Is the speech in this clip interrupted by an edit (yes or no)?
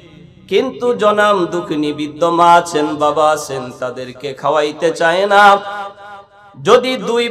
no